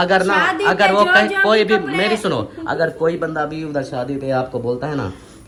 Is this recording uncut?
yes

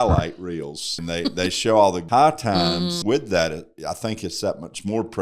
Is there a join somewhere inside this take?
yes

